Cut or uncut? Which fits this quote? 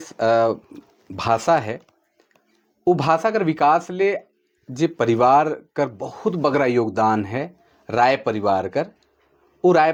uncut